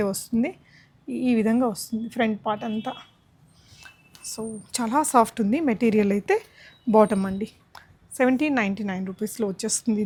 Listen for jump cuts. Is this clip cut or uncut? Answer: uncut